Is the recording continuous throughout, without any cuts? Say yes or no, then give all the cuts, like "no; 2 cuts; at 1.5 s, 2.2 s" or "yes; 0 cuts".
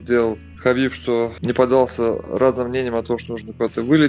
no; 1 cut; at 1.4 s